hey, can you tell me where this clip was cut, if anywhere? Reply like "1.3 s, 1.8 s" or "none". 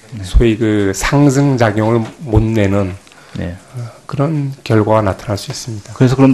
4.6 s

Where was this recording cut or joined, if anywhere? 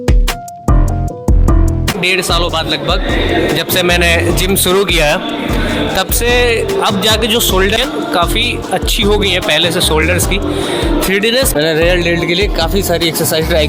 2.0 s, 7.8 s, 11.5 s

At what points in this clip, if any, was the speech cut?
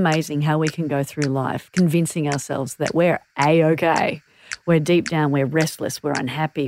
none

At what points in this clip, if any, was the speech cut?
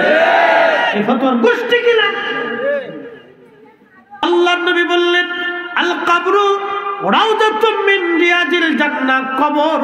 4.2 s

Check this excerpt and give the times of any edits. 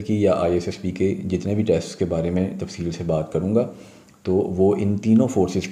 none

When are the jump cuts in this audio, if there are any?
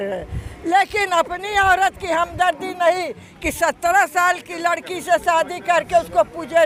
none

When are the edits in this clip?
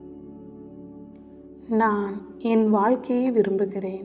1.6 s

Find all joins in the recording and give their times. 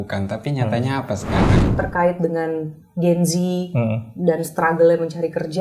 1.7 s

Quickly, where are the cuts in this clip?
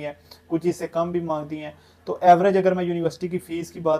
none

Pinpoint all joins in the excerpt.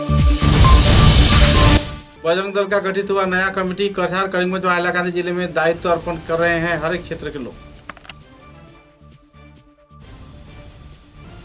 1.8 s

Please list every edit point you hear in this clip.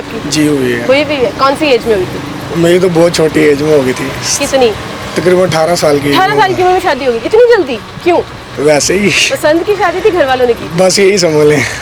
none

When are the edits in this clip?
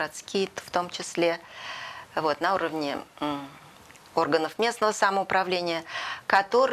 none

